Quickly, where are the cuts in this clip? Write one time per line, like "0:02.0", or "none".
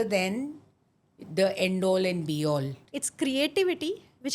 0:02.8